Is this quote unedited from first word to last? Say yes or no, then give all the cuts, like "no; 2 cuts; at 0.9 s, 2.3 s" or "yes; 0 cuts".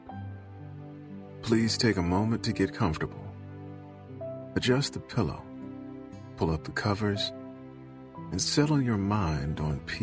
yes; 0 cuts